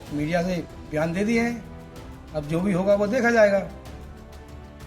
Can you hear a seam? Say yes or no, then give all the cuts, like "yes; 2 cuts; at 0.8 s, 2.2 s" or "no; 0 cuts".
yes; 1 cut; at 4.0 s